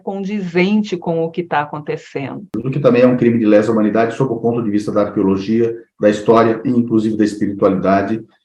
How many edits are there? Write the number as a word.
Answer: one